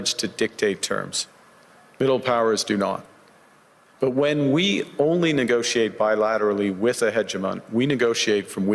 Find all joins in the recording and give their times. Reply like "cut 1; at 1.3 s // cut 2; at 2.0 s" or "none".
none